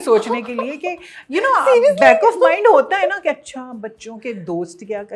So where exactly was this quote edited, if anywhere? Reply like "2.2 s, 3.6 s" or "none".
none